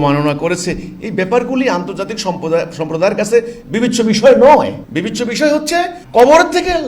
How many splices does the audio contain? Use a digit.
2